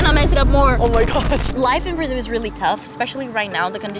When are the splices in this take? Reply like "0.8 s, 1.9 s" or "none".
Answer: 1.5 s